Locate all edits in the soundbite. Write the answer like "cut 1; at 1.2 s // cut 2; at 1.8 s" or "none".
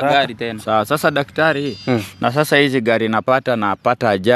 none